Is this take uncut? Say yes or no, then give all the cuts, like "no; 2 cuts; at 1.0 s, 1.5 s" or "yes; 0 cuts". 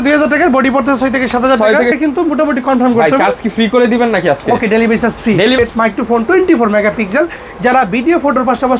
no; 2 cuts; at 2.0 s, 5.6 s